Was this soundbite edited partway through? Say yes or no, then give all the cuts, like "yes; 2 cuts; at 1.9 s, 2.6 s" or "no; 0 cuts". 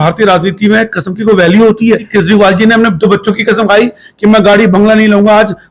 yes; 1 cut; at 2.1 s